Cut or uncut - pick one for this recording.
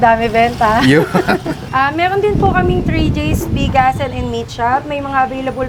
uncut